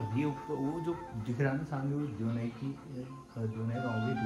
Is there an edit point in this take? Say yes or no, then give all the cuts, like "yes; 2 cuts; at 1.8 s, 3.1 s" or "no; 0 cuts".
no; 0 cuts